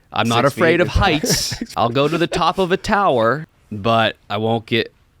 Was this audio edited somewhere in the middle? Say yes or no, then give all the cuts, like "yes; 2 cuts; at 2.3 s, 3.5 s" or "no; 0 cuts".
yes; 2 cuts; at 1.7 s, 3.5 s